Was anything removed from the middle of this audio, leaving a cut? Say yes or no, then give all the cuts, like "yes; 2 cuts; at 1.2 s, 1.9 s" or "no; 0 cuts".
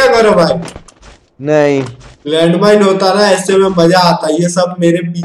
no; 0 cuts